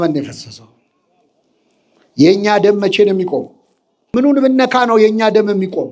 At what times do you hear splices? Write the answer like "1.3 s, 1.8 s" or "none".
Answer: 4.1 s